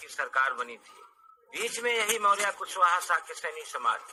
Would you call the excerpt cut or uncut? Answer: uncut